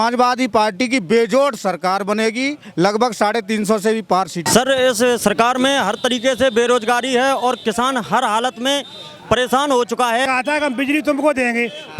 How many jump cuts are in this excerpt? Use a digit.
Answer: 2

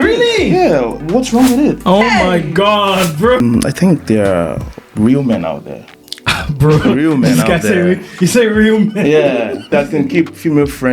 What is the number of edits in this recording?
2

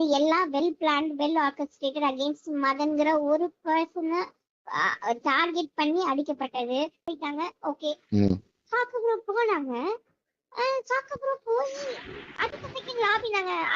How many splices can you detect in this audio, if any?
1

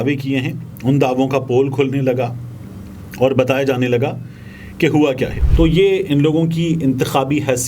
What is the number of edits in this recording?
1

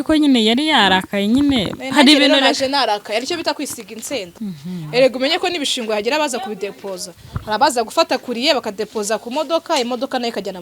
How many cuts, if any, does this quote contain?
1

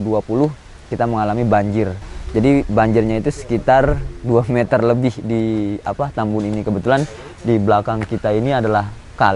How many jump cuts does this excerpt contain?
1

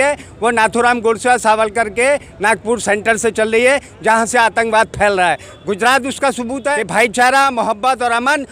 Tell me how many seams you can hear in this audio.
1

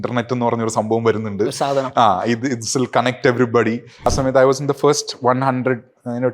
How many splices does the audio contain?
1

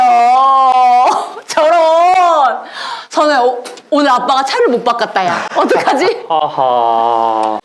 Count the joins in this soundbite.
0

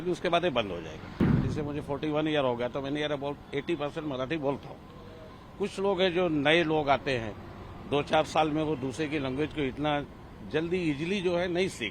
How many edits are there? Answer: 1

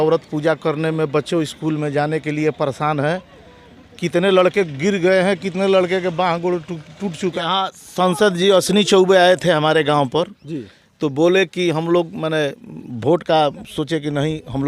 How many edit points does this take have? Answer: 1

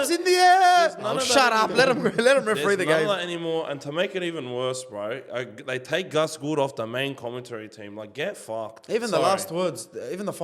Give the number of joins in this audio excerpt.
0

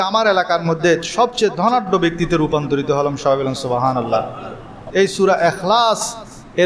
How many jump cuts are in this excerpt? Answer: 1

